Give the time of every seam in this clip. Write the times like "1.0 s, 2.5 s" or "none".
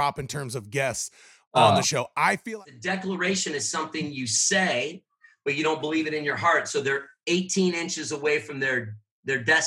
2.4 s